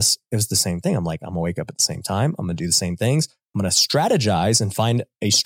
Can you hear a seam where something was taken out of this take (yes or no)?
no